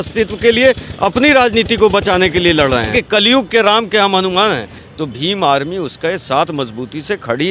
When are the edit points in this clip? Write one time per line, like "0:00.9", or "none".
0:02.9
0:04.8